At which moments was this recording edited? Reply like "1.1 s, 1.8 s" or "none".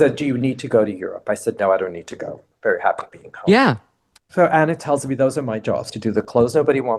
4.2 s, 5.9 s